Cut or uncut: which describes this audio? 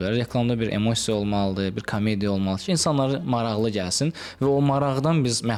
uncut